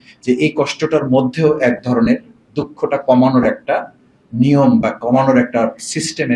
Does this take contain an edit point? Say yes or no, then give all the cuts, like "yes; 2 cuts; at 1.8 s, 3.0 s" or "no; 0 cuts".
no; 0 cuts